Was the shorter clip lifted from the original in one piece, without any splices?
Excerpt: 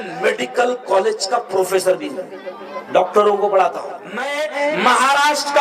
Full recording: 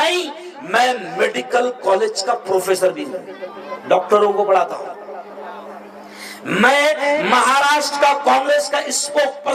no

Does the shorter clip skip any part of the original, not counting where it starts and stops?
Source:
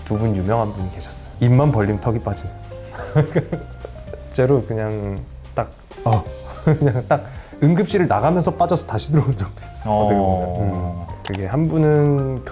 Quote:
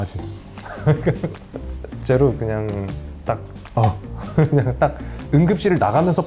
no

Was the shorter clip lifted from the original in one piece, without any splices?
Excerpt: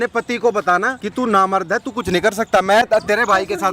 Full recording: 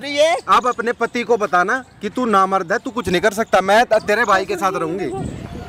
no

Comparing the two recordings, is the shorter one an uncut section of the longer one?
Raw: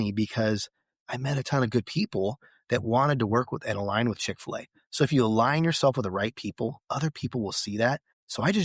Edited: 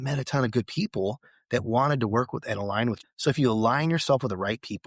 no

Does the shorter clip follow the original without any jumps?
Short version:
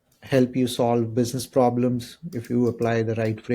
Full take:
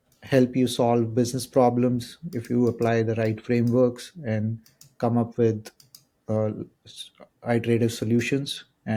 yes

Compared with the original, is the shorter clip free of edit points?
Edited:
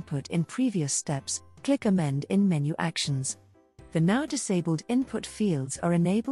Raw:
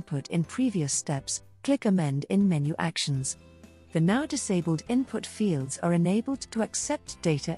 yes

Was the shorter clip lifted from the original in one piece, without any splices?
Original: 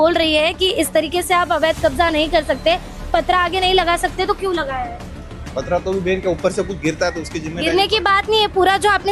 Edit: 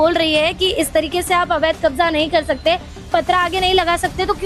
yes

